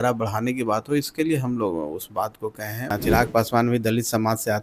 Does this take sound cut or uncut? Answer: cut